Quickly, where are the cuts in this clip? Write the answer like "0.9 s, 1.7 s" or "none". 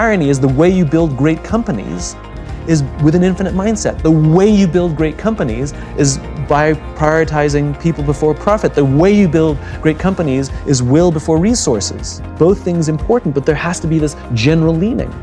12.3 s